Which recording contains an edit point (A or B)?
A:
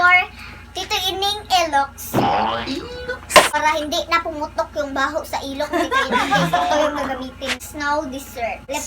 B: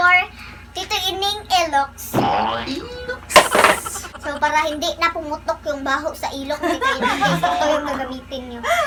A